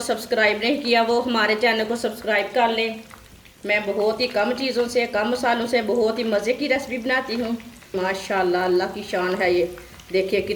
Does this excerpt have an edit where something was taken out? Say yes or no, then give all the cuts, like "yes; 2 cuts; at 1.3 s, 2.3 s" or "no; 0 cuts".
yes; 1 cut; at 7.9 s